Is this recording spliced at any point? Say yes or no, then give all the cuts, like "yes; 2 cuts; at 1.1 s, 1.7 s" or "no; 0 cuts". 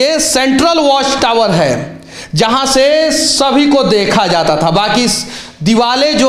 no; 0 cuts